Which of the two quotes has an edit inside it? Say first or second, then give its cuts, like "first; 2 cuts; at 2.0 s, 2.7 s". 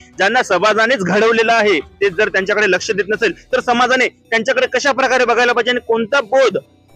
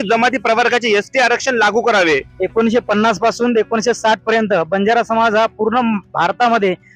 second; 1 cut; at 2.3 s